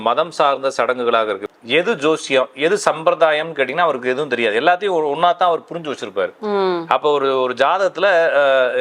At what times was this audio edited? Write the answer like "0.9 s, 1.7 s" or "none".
1.4 s